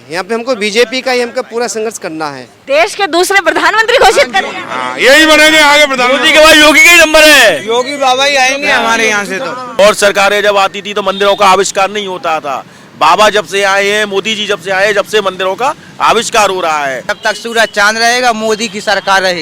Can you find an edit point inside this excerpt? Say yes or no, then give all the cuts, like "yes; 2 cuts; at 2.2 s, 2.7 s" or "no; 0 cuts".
yes; 3 cuts; at 2.6 s, 9.8 s, 17.1 s